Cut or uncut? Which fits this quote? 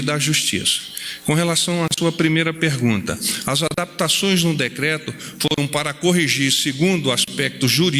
uncut